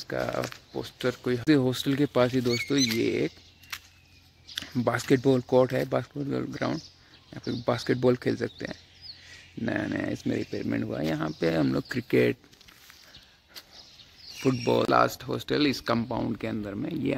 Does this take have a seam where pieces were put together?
yes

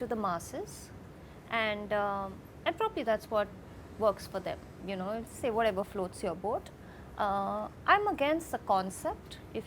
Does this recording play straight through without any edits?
yes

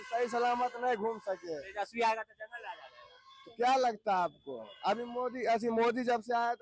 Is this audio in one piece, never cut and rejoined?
yes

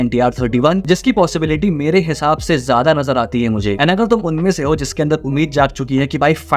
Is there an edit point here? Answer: no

